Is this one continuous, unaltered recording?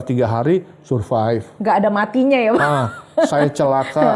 yes; 0 cuts

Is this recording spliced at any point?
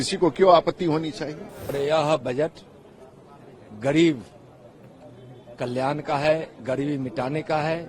yes; 1 cut; at 1.7 s

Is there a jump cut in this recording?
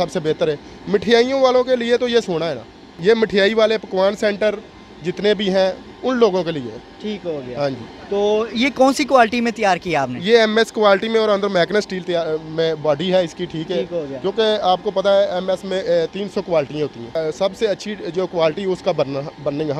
no; 0 cuts

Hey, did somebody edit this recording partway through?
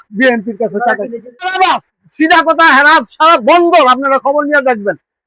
yes; 1 cut; at 1.5 s

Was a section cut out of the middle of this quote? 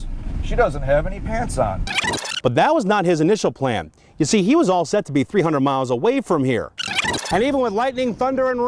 yes; 2 cuts; at 2.0 s, 6.9 s

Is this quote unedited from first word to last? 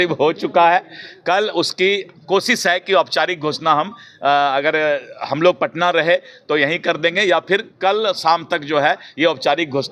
yes; 0 cuts

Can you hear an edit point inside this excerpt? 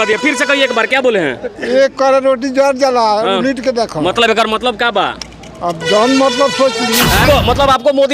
yes; 1 cut; at 7.2 s

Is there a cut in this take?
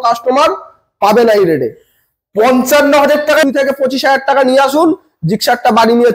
yes; 1 cut; at 3.4 s

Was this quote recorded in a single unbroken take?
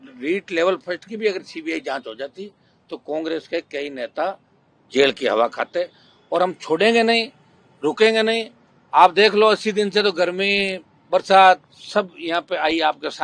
yes; 0 cuts

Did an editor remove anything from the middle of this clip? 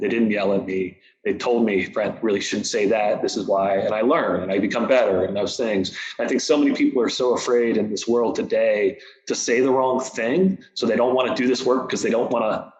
no; 0 cuts

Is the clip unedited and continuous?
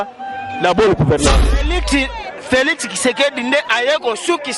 no; 1 cut; at 1.8 s

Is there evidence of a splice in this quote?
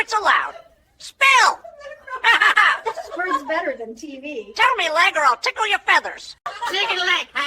no; 0 cuts

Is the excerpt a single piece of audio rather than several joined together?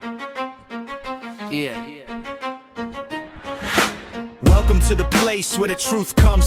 no; 1 cut; at 1.3 s

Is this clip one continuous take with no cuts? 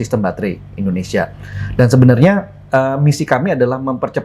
yes; 0 cuts

